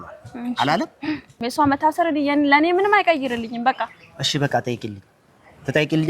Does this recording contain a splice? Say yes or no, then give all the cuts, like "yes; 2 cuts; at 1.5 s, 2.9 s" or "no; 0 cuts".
yes; 1 cut; at 1.4 s